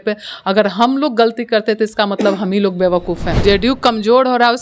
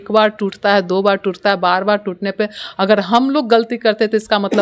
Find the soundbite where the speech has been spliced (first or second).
first